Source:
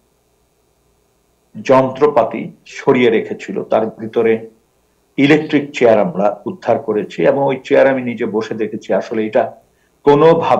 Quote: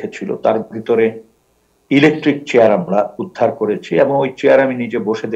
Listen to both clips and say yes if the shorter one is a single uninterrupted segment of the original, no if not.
yes